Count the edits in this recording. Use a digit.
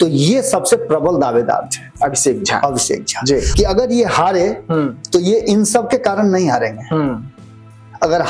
1